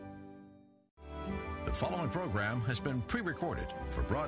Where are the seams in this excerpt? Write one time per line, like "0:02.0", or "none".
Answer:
0:01.0